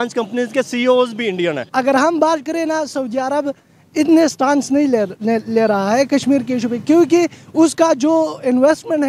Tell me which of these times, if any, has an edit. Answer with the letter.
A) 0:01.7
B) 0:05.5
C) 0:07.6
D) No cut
A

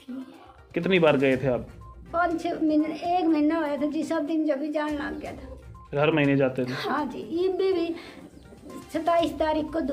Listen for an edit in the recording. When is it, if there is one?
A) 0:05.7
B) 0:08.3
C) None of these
C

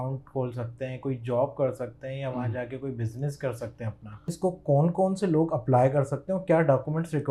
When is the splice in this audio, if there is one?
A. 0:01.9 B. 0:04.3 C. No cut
B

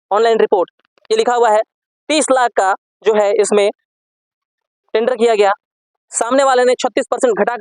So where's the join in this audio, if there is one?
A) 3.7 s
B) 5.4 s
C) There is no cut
C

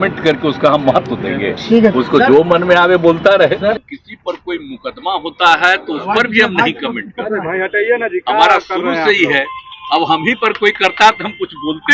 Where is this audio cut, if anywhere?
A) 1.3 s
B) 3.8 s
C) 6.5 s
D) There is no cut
B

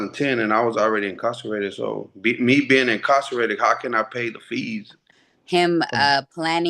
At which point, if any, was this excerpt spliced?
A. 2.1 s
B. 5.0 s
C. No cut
B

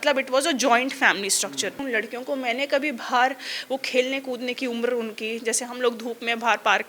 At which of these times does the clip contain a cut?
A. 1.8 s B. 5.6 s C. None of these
A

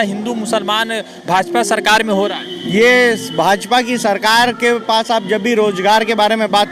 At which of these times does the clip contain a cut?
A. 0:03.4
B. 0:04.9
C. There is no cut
C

